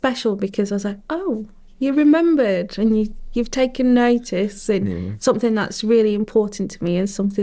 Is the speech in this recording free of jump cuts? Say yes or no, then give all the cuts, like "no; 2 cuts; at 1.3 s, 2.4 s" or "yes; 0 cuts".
yes; 0 cuts